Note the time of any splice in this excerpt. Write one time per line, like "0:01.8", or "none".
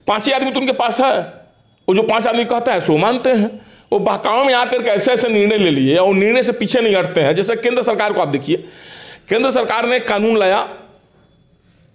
none